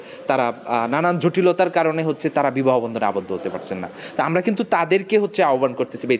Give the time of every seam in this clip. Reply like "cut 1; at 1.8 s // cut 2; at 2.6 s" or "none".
none